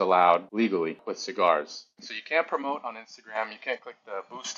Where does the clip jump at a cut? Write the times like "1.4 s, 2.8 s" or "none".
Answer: 2.1 s